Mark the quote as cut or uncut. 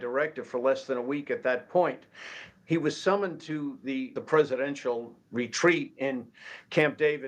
cut